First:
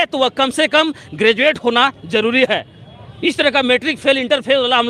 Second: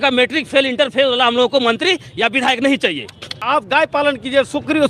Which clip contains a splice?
second; 1 cut; at 3.4 s

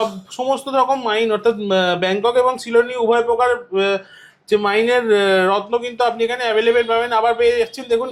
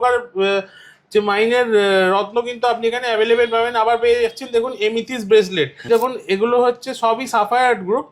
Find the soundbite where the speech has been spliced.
second; 1 cut; at 5.9 s

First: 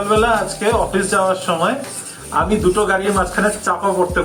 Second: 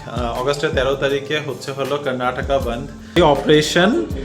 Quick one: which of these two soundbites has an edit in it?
second; 1 cut; at 3.1 s

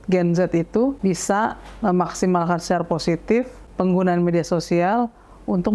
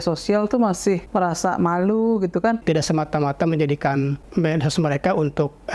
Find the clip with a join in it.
second; 3 cuts; at 1.0 s, 2.6 s, 4.2 s

